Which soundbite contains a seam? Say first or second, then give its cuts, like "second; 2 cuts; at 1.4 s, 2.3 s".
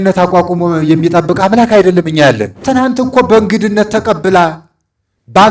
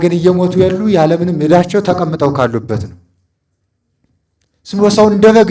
first; 1 cut; at 2.5 s